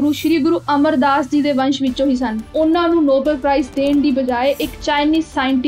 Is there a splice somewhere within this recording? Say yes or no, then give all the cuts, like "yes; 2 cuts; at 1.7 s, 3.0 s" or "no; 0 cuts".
yes; 1 cut; at 2.4 s